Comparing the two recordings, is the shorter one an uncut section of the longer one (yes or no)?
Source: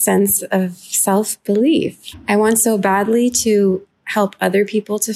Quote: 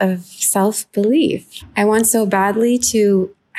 yes